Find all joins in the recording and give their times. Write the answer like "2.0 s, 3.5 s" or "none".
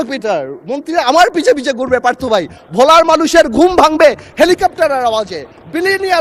none